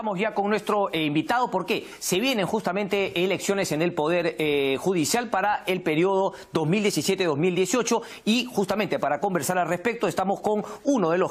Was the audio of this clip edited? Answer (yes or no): no